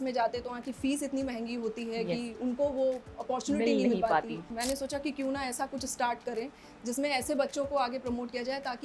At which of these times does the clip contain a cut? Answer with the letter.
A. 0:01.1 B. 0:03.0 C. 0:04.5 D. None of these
C